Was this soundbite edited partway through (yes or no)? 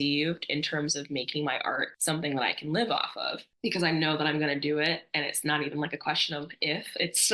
no